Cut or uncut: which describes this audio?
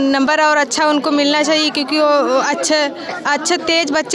uncut